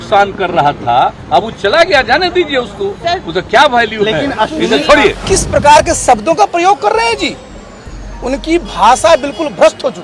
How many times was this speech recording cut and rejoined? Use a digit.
1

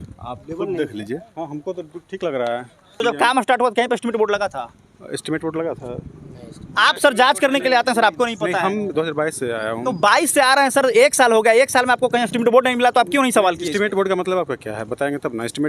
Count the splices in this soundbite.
1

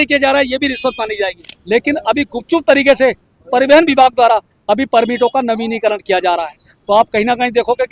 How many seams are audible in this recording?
1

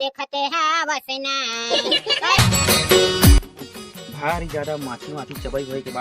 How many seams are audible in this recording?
1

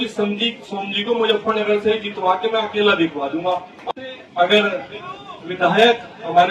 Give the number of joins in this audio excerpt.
1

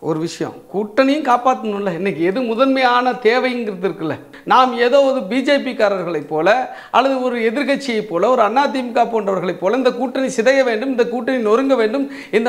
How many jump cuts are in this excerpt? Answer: 1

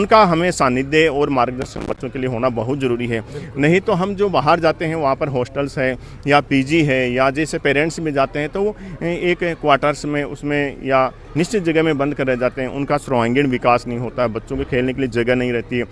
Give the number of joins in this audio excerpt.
0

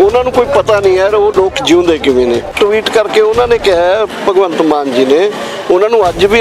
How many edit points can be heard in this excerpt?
1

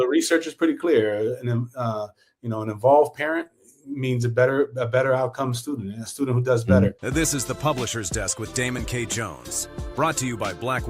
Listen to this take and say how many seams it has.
1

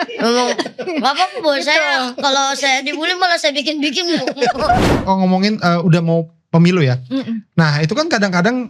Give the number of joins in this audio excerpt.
1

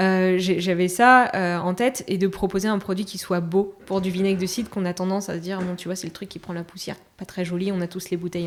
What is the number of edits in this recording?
0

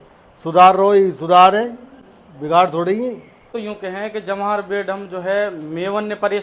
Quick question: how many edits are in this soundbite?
1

